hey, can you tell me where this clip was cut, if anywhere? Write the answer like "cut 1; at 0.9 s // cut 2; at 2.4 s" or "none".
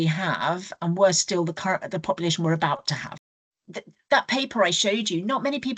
cut 1; at 3.3 s

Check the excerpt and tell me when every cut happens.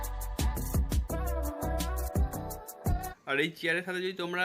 cut 1; at 3.1 s

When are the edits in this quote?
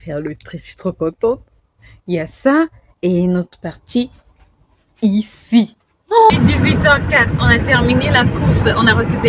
cut 1; at 6.3 s

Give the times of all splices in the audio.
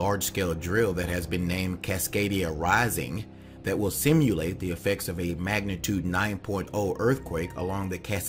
cut 1; at 5.0 s

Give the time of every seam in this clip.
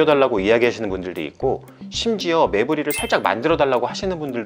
none

